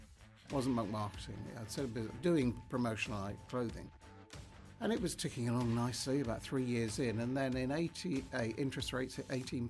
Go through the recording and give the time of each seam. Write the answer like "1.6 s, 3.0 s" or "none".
none